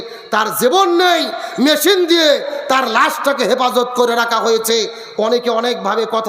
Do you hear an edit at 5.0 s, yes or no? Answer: no